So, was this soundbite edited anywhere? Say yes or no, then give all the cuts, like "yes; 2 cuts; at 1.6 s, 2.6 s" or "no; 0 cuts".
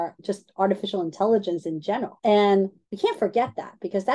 yes; 2 cuts; at 2.1 s, 2.8 s